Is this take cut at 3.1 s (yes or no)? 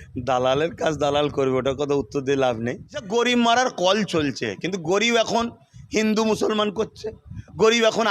yes